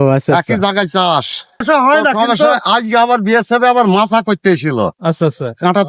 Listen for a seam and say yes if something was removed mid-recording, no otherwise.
yes